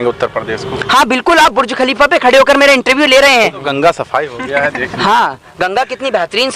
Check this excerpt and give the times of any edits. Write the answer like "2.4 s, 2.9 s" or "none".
3.6 s